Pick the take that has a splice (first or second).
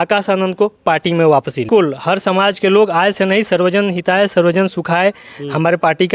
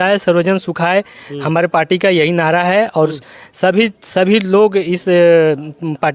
first